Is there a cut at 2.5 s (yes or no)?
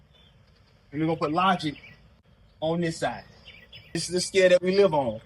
no